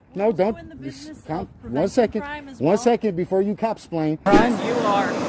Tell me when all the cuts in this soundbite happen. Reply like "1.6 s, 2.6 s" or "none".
4.2 s